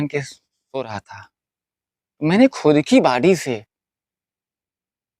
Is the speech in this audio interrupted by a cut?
no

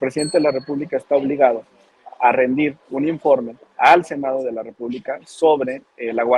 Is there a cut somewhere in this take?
no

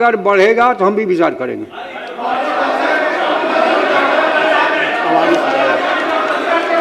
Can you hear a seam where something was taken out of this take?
no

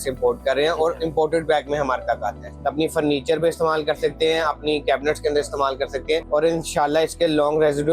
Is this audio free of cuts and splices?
no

